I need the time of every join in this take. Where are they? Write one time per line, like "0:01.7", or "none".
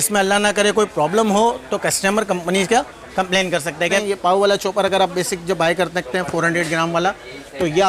0:04.0